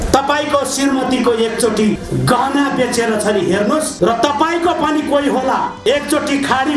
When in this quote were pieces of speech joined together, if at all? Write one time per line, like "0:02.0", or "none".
0:02.0
0:03.9
0:05.7